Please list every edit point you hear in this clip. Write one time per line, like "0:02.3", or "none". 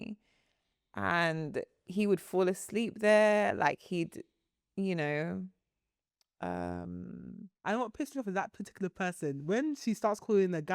0:07.6